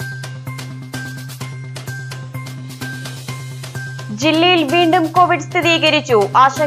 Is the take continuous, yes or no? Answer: no